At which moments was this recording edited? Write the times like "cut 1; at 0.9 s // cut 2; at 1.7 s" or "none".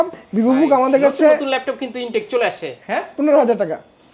cut 1; at 2.8 s